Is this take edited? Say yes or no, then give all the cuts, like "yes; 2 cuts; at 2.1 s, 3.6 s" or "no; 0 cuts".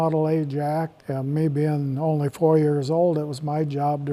yes; 1 cut; at 1.0 s